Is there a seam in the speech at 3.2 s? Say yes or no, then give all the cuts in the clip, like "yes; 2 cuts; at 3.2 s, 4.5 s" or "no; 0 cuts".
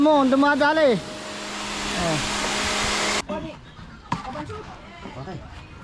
yes; 1 cut; at 3.2 s